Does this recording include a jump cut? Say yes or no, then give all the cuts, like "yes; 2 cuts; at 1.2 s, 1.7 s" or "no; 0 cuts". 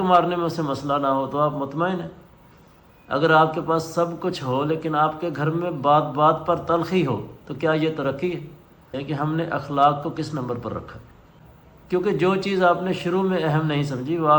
yes; 1 cut; at 8.9 s